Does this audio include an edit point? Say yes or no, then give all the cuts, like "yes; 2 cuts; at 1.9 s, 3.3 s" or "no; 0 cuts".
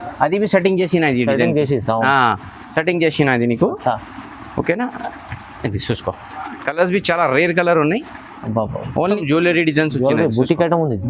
yes; 1 cut; at 9.2 s